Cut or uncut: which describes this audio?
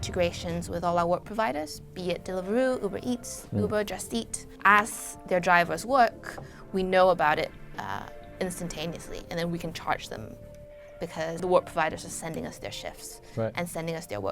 cut